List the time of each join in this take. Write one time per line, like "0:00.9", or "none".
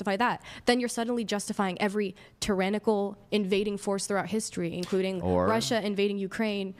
none